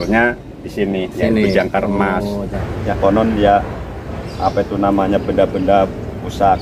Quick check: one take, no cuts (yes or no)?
no